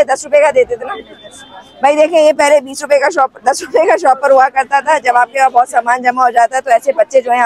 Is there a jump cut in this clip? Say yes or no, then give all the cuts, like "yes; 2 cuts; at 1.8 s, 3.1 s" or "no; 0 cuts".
no; 0 cuts